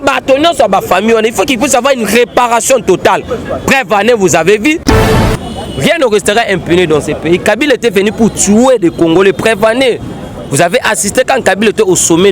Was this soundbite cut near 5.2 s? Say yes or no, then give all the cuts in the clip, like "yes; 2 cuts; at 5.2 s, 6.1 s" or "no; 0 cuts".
yes; 1 cut; at 5.2 s